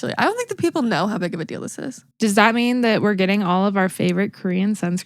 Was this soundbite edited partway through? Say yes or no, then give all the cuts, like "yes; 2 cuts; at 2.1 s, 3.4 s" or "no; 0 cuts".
yes; 1 cut; at 2.0 s